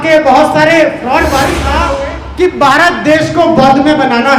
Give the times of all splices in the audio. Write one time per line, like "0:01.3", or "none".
0:01.8